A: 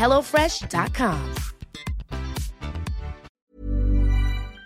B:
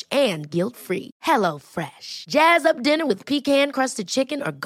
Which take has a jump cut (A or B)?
A